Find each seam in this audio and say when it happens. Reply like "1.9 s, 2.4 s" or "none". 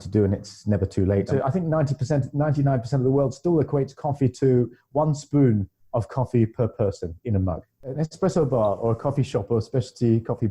1.3 s, 8.0 s